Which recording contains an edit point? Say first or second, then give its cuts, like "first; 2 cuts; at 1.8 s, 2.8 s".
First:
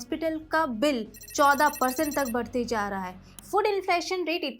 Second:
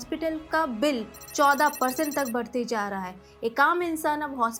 first; 1 cut; at 3.3 s